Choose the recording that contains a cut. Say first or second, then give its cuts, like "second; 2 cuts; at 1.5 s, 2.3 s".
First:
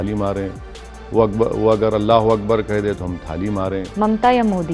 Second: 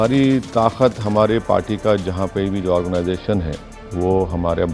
first; 1 cut; at 3.8 s